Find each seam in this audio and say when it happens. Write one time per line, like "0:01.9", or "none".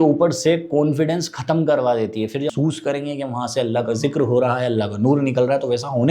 0:02.5

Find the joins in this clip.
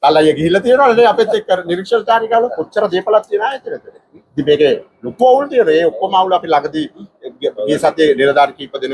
none

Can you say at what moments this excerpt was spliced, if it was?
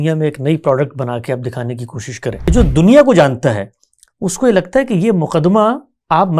0:02.5

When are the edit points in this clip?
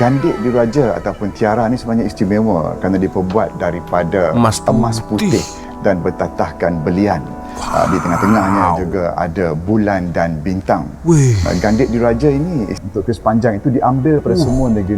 0:12.8

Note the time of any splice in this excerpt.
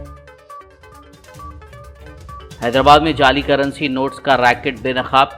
0:01.6

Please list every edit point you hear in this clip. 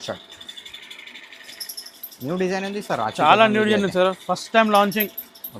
none

